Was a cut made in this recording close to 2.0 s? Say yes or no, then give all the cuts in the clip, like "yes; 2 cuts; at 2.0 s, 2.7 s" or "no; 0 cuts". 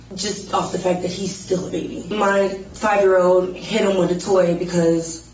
yes; 1 cut; at 2.0 s